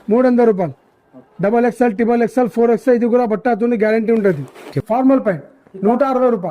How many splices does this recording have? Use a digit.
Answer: 1